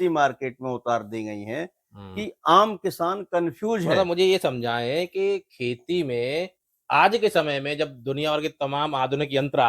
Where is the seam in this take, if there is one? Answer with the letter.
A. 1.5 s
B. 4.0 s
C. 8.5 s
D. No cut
B